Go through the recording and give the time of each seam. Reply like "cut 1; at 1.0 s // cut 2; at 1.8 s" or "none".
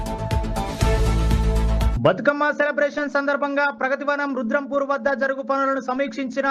cut 1; at 1.9 s